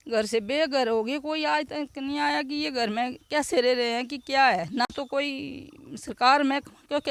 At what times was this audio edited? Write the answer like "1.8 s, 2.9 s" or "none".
none

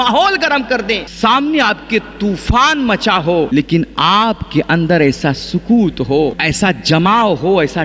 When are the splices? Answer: 1.1 s, 3.5 s, 6.4 s

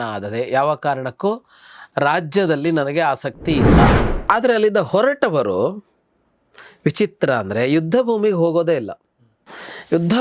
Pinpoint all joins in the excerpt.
3.9 s

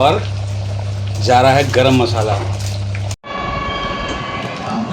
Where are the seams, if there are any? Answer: 3.0 s

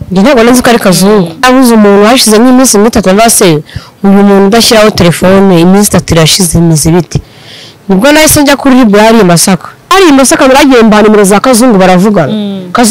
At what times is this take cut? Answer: 1.4 s, 9.9 s

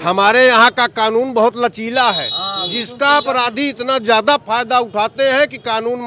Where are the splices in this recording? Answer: none

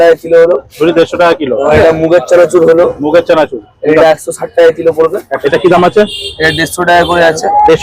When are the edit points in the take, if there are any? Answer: 1.7 s, 5.4 s

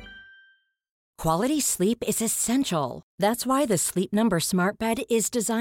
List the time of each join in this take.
1.1 s

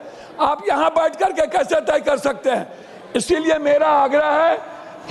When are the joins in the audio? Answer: none

